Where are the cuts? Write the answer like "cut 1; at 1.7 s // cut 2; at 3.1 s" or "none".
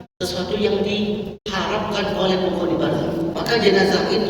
cut 1; at 3.4 s